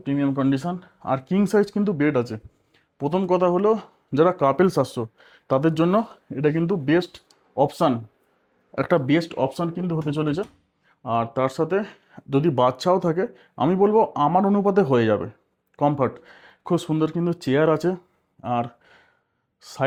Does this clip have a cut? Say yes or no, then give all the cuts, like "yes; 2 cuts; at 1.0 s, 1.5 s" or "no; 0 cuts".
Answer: no; 0 cuts